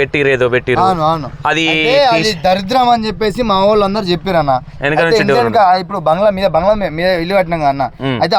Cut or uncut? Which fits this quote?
uncut